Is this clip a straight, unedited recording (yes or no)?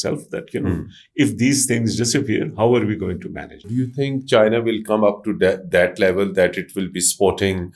no